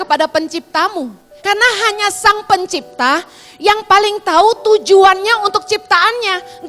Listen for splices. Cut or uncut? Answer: cut